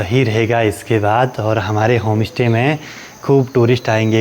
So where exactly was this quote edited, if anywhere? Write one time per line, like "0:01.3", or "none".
none